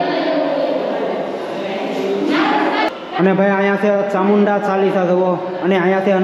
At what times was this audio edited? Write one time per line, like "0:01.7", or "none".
none